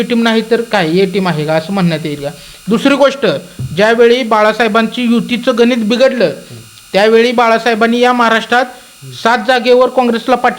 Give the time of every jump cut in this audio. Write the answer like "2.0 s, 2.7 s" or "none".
none